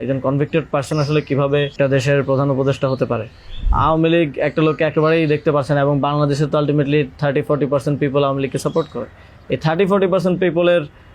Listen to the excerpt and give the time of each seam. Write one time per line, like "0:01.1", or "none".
0:01.7
0:03.7